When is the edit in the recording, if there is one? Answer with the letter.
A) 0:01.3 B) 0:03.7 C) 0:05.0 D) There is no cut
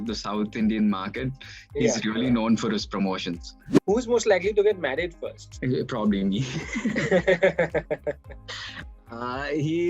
B